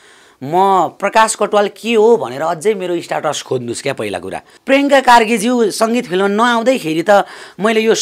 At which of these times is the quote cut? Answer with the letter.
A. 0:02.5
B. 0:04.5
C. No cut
B